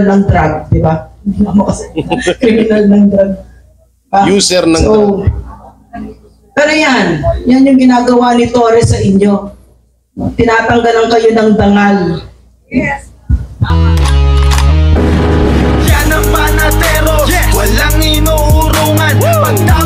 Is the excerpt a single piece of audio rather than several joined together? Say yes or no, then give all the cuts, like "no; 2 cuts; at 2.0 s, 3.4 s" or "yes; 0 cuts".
no; 1 cut; at 13.6 s